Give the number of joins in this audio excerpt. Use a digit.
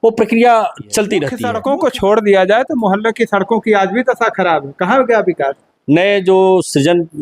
1